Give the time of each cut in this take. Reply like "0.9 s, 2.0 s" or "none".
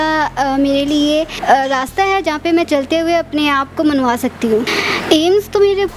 1.3 s, 4.7 s